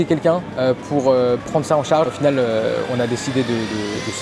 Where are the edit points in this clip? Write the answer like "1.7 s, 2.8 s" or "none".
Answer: 2.1 s